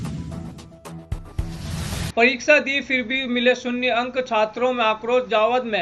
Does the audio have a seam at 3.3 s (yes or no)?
no